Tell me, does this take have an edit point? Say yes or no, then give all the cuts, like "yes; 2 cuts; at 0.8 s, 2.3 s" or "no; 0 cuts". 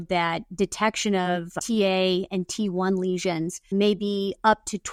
no; 0 cuts